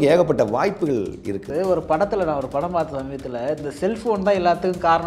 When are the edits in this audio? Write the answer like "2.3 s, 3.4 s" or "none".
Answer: none